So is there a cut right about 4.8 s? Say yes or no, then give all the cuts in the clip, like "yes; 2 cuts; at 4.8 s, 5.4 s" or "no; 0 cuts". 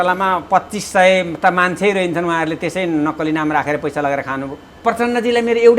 yes; 1 cut; at 4.8 s